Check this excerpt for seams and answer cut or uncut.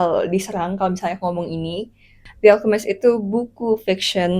cut